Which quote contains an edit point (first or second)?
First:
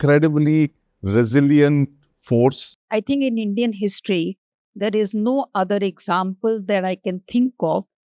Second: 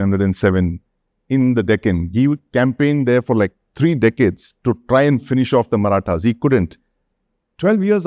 first